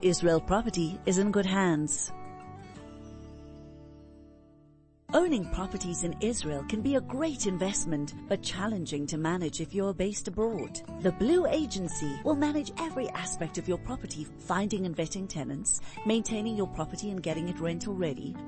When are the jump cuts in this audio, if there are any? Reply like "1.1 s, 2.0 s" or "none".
none